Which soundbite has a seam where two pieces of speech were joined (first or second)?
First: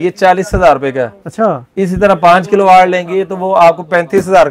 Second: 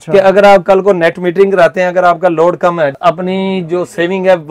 second